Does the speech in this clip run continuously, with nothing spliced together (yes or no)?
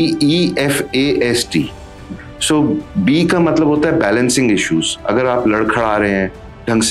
yes